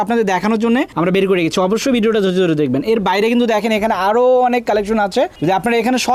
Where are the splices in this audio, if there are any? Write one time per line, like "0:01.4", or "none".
none